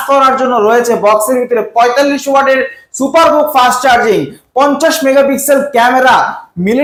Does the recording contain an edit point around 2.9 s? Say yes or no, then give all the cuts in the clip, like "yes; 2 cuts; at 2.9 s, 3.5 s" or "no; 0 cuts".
no; 0 cuts